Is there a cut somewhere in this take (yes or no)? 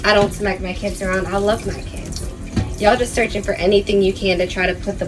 no